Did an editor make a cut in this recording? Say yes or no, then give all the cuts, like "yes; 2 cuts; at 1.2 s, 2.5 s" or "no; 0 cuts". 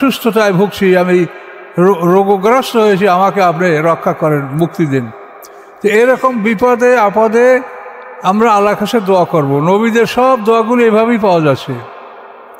no; 0 cuts